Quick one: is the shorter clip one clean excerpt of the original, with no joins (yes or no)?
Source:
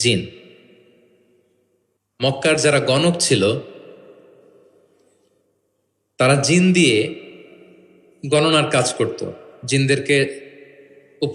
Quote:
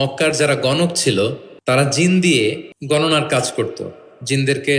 no